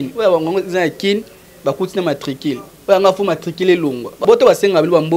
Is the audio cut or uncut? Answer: cut